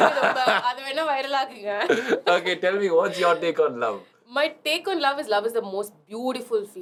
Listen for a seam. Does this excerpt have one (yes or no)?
no